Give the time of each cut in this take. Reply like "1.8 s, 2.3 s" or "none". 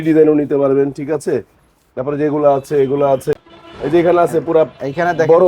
3.4 s